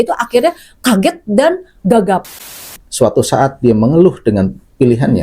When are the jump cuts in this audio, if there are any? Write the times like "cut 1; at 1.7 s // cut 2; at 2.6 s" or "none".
cut 1; at 2.4 s